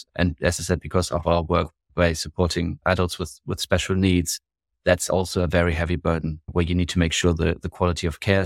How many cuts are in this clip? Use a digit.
0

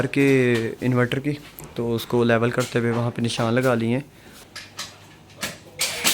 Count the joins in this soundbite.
1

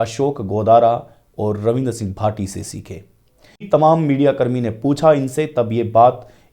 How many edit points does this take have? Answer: 1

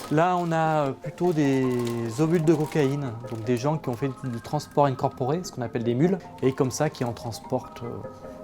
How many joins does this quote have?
1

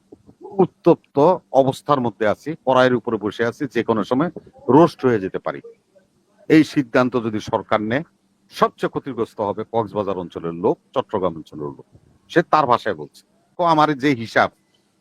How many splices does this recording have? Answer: 1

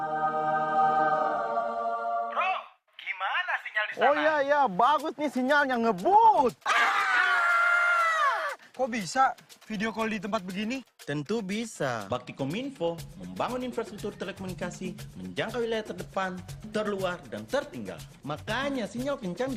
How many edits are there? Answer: 0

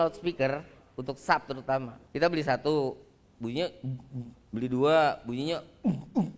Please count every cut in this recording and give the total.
0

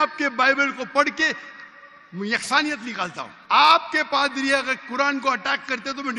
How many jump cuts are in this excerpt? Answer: 1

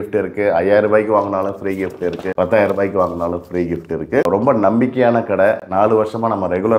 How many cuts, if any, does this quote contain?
0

